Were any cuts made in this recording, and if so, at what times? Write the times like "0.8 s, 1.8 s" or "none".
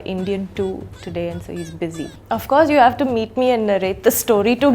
2.1 s